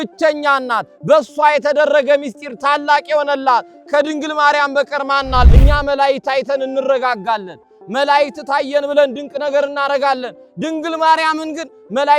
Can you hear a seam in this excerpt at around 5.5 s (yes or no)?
yes